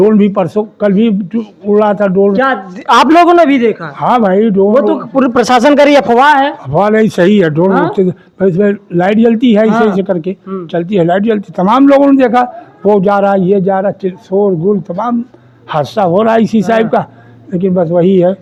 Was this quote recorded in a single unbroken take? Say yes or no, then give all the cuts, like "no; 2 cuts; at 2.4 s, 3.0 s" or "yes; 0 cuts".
yes; 0 cuts